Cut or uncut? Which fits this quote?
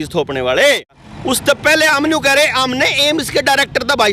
cut